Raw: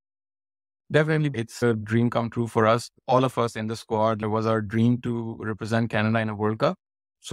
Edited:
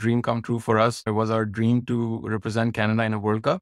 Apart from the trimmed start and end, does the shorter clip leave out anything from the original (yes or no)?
yes